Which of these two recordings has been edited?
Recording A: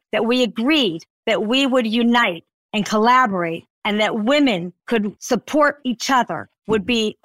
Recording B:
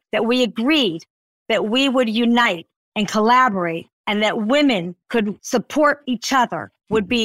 A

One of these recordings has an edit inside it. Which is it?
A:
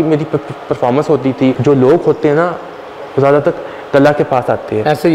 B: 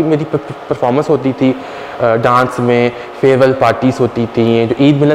A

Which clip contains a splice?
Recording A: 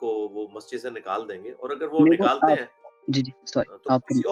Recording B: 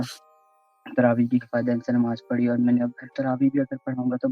B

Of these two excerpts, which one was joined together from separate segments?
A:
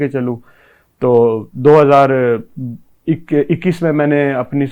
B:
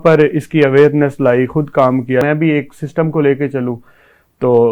B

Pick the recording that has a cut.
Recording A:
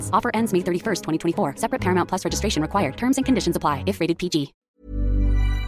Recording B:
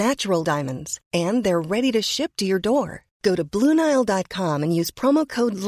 A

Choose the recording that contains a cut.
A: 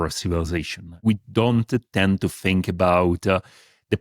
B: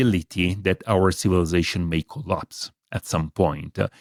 A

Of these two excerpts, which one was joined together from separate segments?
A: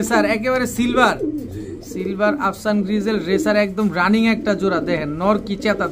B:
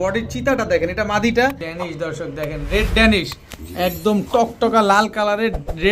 B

